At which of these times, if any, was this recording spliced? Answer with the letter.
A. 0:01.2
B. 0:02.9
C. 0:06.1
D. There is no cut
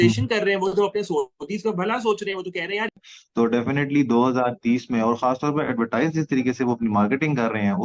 B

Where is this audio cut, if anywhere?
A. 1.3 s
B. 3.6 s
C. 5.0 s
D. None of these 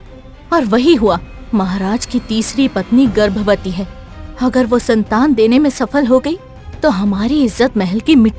A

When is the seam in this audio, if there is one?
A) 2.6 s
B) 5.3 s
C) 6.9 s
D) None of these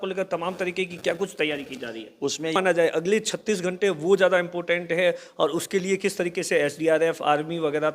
A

